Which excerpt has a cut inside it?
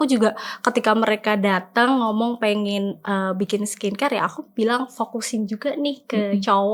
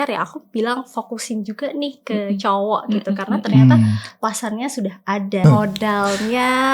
second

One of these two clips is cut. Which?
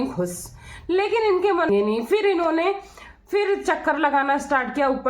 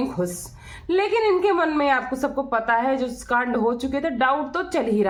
first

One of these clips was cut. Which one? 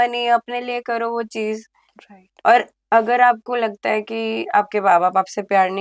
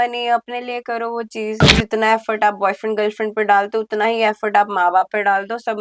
second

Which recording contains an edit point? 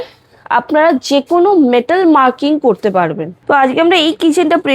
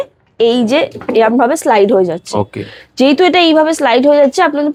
first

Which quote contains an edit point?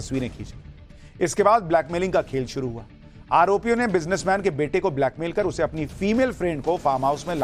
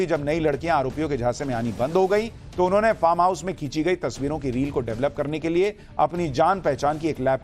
second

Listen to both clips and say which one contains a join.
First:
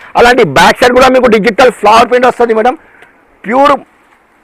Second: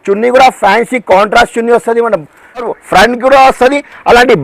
second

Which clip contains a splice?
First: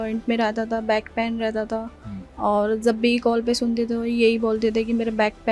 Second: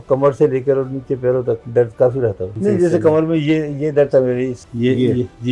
second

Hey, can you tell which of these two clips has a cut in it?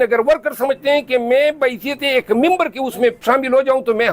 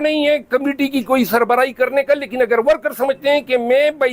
first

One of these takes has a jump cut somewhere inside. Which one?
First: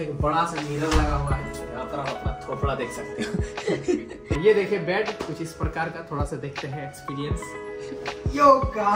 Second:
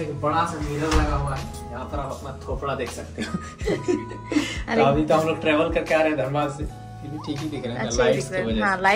first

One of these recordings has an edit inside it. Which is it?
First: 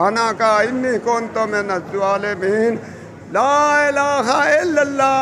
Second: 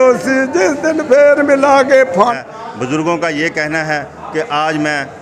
second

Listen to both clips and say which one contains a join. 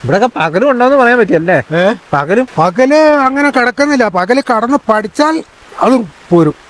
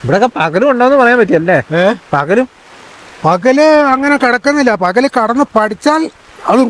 first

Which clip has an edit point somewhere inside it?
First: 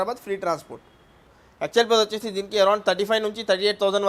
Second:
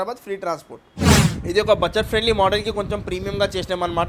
first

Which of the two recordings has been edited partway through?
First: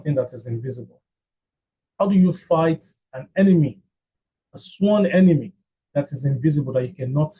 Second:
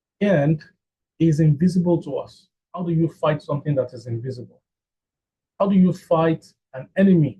second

